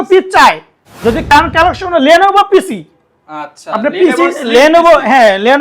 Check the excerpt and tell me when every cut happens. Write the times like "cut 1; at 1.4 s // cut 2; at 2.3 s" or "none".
cut 1; at 1.3 s